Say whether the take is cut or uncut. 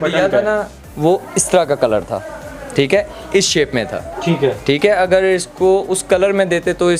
uncut